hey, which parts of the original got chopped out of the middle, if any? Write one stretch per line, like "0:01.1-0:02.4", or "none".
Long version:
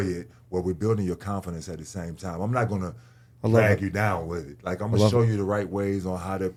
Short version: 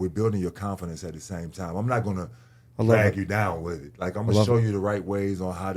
none